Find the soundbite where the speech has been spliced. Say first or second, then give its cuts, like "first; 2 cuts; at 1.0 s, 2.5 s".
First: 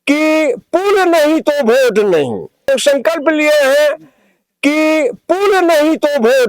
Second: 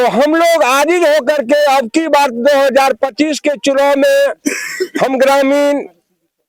first; 1 cut; at 2.7 s